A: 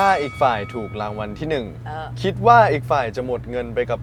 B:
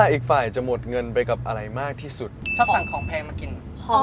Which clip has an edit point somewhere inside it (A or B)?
B